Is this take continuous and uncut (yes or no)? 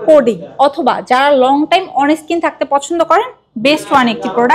yes